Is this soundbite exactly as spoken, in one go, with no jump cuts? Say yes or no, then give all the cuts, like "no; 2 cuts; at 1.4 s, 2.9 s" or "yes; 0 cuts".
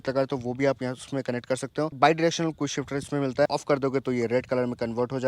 no; 2 cuts; at 2.0 s, 3.5 s